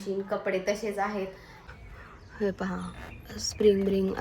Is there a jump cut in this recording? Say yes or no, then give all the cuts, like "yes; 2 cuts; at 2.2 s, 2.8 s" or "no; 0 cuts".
yes; 1 cut; at 1.5 s